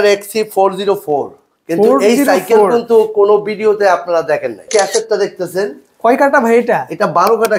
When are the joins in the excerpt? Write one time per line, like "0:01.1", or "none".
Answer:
0:04.7

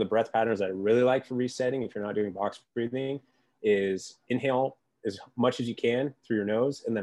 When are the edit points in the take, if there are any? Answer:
none

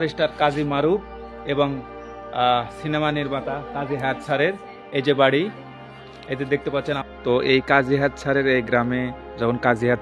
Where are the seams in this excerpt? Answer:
0:07.0

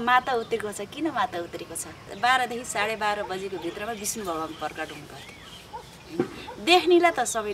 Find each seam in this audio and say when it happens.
0:02.1

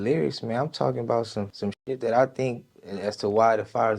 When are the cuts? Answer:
0:01.5
0:02.7

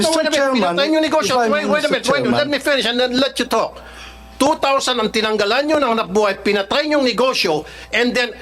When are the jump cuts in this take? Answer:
none

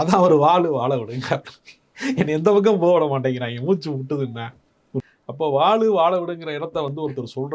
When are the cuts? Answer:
0:05.0

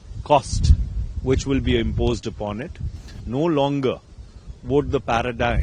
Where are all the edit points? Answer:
0:03.1

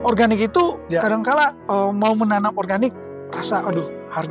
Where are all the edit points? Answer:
0:01.6

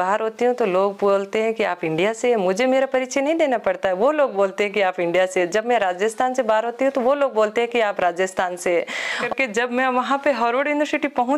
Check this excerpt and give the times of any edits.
0:09.2

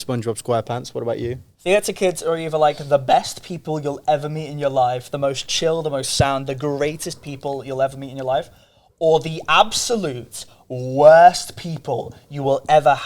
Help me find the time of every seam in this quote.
0:01.5

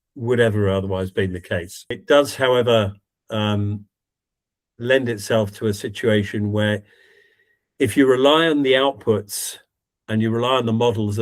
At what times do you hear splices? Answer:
0:02.0

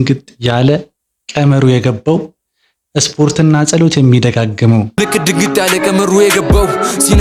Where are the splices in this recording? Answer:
0:04.9

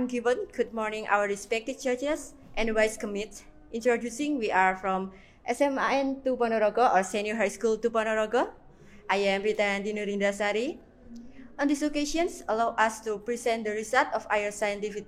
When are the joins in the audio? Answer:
none

